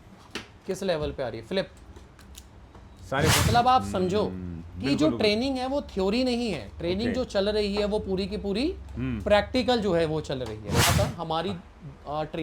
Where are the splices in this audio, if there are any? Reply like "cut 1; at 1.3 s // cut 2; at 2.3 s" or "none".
cut 1; at 3.4 s // cut 2; at 10.9 s